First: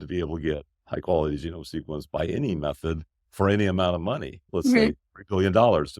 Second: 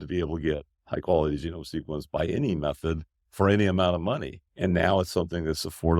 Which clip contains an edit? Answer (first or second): second